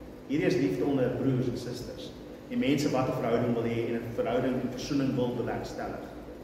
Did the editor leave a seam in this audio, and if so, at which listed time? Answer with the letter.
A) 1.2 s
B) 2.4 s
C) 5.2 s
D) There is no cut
D